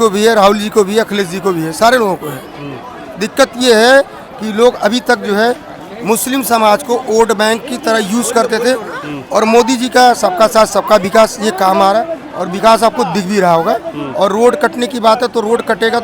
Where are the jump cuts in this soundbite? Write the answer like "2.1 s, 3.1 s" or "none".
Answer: none